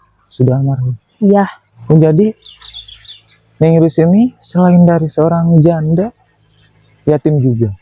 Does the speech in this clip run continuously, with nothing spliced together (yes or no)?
no